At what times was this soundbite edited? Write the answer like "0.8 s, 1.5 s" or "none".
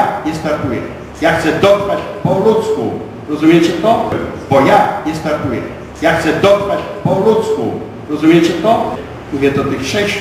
4.2 s, 9.1 s

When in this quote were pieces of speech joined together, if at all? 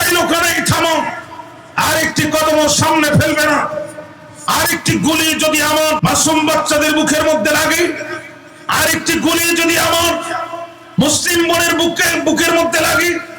6.0 s

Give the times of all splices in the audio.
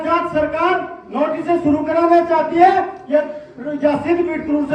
none

